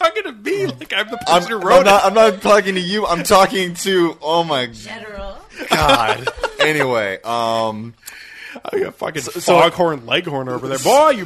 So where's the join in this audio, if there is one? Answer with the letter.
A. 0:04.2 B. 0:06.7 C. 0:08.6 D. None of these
D